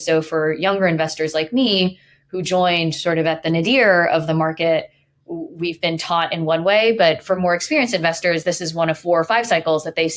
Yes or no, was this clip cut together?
no